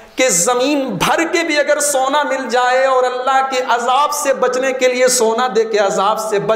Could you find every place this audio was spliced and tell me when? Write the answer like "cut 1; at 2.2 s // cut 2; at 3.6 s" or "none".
none